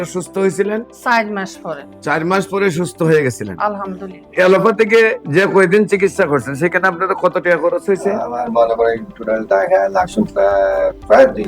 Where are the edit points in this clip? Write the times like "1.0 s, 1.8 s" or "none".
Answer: 4.3 s